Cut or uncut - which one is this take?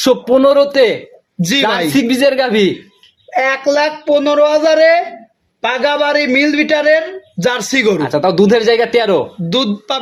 uncut